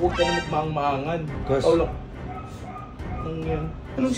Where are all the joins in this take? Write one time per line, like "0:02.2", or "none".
0:01.3